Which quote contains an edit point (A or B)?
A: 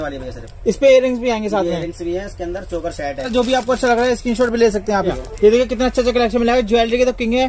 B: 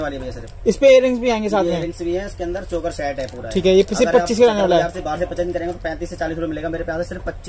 A